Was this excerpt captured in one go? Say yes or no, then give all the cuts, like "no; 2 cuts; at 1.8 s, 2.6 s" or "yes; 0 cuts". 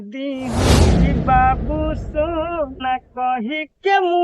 no; 1 cut; at 0.9 s